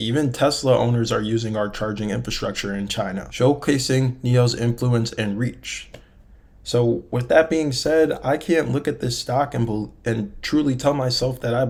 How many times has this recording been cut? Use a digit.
0